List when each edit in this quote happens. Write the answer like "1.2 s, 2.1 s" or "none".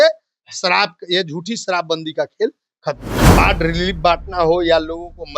3.3 s